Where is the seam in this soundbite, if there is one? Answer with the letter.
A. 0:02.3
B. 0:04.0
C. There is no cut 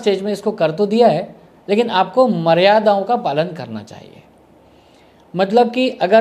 C